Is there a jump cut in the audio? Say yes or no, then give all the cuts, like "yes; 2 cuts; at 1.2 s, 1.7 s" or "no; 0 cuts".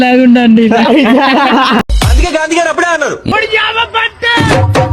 yes; 1 cut; at 1.9 s